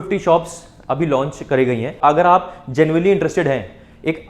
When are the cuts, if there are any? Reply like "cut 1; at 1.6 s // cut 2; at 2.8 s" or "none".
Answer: cut 1; at 2.0 s